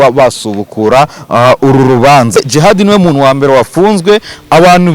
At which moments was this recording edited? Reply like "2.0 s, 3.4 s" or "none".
2.4 s